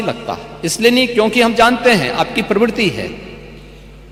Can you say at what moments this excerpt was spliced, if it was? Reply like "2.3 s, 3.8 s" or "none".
none

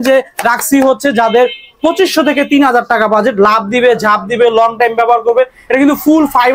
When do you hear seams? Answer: none

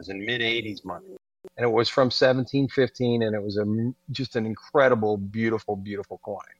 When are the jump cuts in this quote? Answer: 1.2 s

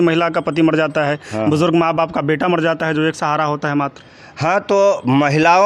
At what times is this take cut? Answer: none

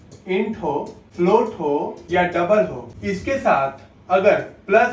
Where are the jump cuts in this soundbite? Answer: 1.0 s, 2.0 s, 2.9 s

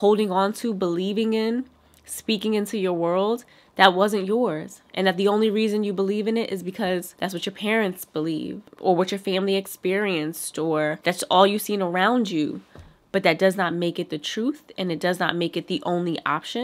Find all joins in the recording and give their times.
none

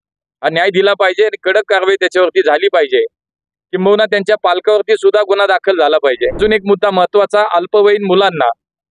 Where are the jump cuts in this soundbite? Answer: 6.4 s

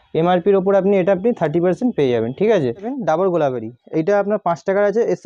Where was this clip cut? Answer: 2.9 s

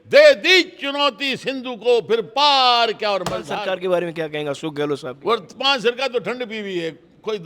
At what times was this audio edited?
3.5 s

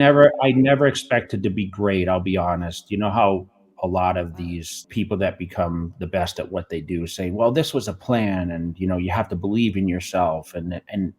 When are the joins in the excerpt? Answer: 4.8 s

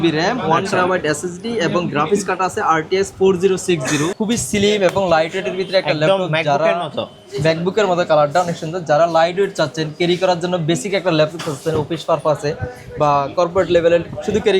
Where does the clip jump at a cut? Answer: 4.1 s

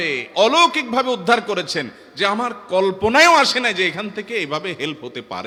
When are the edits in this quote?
none

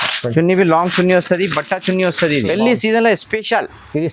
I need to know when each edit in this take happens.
2.5 s

